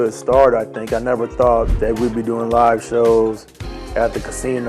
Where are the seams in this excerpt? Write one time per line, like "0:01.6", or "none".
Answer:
0:01.7